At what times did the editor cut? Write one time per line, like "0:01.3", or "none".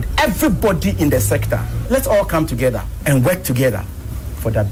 none